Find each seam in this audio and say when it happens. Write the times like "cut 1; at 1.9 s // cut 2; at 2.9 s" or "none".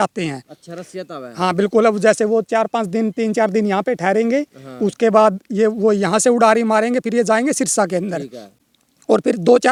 none